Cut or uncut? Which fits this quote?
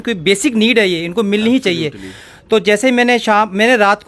uncut